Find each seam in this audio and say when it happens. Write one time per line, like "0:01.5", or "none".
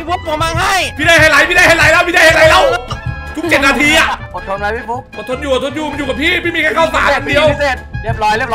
0:04.2